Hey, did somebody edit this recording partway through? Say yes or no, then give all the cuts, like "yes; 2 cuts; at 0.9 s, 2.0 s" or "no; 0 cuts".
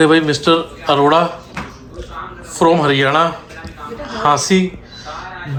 no; 0 cuts